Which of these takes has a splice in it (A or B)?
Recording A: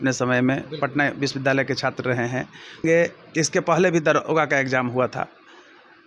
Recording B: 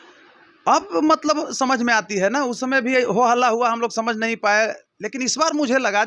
A